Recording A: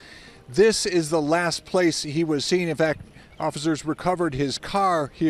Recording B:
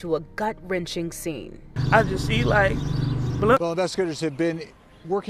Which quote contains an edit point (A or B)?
B